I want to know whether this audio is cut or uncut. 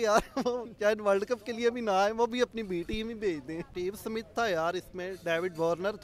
cut